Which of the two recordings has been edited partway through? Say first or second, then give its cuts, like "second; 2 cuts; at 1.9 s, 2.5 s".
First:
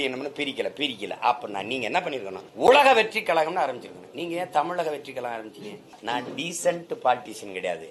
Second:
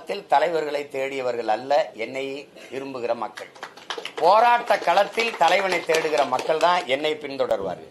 first; 2 cuts; at 2.4 s, 6.0 s